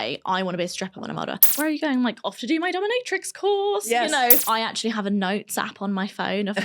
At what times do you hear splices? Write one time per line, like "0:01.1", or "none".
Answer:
0:01.5
0:04.4